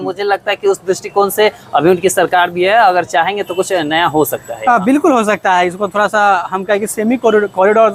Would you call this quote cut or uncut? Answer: uncut